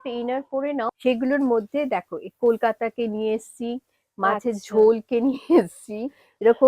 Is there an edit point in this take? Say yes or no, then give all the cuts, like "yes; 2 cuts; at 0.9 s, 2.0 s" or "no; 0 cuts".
yes; 1 cut; at 0.9 s